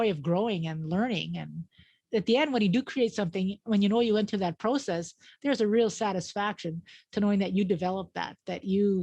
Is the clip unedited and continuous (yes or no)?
no